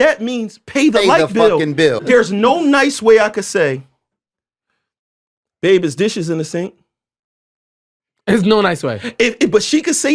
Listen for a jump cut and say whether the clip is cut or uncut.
cut